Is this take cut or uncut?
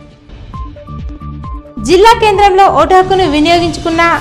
uncut